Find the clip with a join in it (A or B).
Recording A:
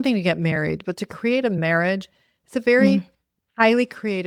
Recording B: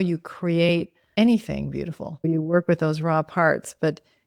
B